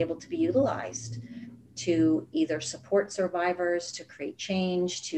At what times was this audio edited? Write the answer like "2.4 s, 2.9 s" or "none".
none